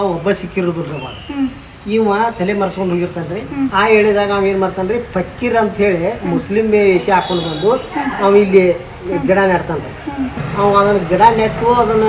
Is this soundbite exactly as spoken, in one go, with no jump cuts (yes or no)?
no